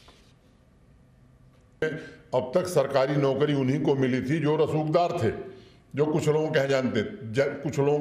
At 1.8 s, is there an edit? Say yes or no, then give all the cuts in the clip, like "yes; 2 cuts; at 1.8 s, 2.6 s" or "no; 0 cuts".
yes; 1 cut; at 1.8 s